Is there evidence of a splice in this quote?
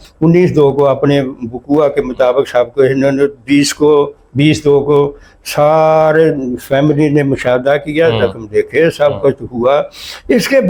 no; 0 cuts

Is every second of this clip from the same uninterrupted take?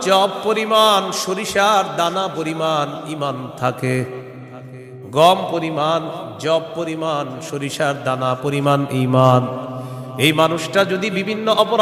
yes; 0 cuts

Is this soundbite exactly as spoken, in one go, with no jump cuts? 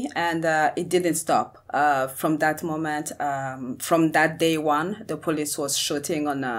yes; 0 cuts

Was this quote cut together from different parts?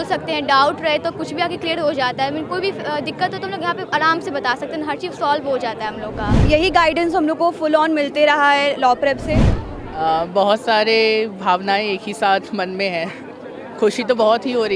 yes; 2 cuts; at 6.3 s, 9.5 s

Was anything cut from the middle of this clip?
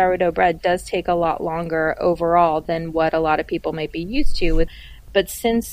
yes; 1 cut; at 4.7 s

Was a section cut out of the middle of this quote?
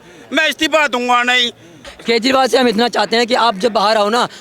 yes; 1 cut; at 1.9 s

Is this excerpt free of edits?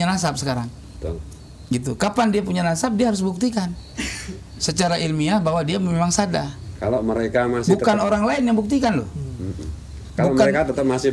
yes; 0 cuts

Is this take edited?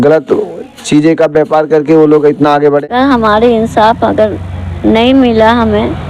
yes; 1 cut; at 2.8 s

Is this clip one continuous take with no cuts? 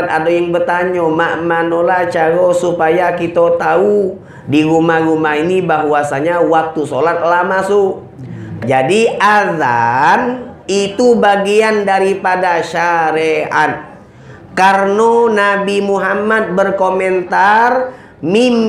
no; 1 cut; at 8.5 s

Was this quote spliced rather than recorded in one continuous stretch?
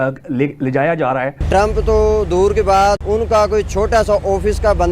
yes; 2 cuts; at 1.5 s, 3.0 s

